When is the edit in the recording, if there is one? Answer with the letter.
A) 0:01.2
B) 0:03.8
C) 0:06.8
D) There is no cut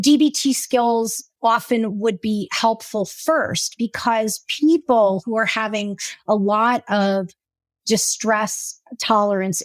A